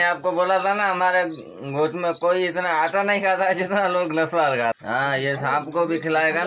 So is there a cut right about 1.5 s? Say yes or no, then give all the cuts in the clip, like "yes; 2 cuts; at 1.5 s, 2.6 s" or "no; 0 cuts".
no; 1 cut; at 4.8 s